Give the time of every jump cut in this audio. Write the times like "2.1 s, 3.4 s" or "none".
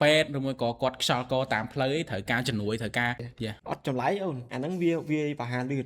3.2 s